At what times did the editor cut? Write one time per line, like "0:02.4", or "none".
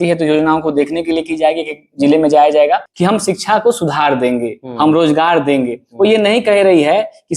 0:02.9